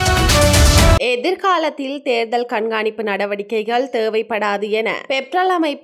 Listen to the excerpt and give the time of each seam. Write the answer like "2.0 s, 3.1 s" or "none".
0.9 s